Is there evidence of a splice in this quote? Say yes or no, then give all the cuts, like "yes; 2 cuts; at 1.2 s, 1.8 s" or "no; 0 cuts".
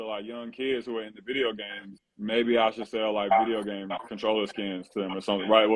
no; 0 cuts